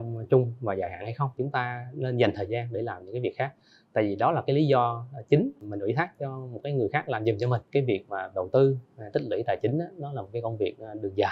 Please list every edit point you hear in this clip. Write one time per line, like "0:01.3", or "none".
0:01.4
0:05.6
0:07.7